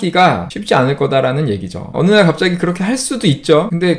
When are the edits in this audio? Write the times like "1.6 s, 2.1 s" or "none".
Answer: 1.9 s